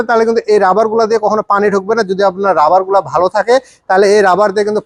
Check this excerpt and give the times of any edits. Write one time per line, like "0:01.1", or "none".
none